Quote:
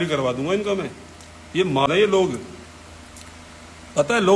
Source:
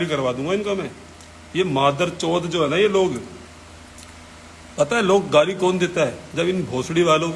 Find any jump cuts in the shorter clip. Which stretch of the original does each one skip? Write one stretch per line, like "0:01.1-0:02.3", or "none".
0:01.9-0:02.7